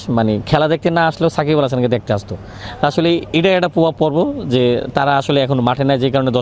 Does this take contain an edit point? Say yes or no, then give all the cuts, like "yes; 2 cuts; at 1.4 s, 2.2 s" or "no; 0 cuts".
no; 0 cuts